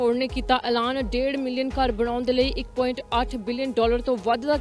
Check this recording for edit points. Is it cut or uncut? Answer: uncut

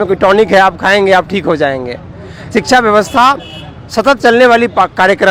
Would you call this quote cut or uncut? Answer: uncut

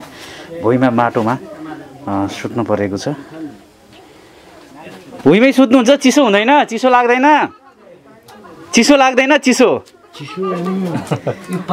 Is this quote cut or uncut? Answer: uncut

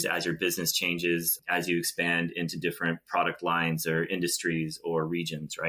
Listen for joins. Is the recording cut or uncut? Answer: uncut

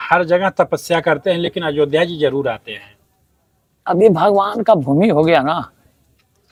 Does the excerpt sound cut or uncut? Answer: uncut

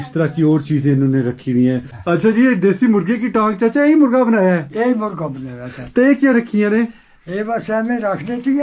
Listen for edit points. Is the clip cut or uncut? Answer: cut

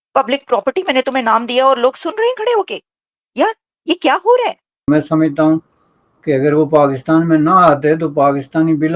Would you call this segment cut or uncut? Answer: cut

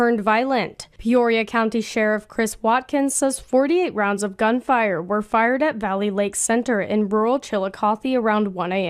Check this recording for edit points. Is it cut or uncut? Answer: uncut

